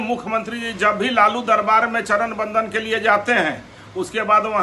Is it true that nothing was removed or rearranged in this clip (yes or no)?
yes